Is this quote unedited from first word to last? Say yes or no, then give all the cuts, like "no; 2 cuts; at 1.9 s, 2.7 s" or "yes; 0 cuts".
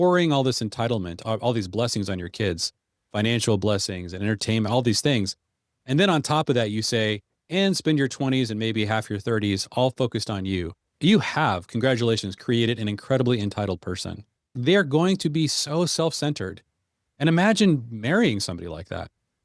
no; 3 cuts; at 1.2 s, 10.9 s, 14.5 s